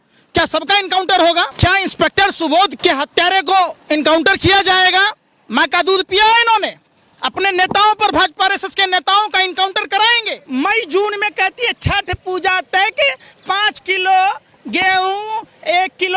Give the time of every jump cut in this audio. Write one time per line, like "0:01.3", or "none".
0:01.5
0:02.7
0:10.3